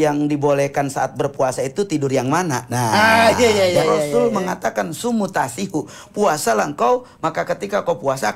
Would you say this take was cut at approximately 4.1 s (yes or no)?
yes